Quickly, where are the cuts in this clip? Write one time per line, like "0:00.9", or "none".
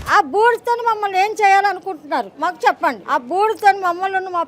0:02.3
0:03.0